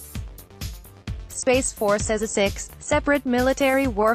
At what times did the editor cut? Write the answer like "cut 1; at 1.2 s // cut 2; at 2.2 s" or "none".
cut 1; at 1.4 s